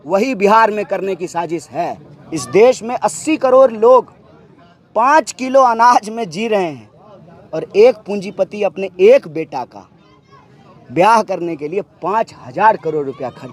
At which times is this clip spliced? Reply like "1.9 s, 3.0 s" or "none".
2.1 s